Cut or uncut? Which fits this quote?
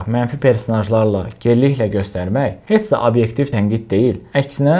uncut